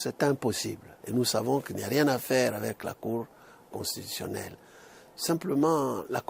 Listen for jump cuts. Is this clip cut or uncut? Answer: cut